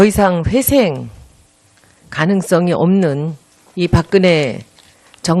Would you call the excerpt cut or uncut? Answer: uncut